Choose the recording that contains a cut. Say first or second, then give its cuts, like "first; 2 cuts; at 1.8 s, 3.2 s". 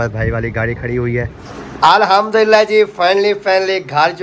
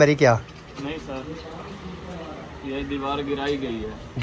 first; 1 cut; at 1.4 s